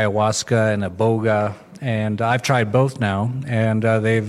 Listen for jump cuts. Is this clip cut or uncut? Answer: uncut